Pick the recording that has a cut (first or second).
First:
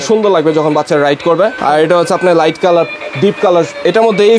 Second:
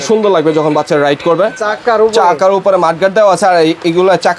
second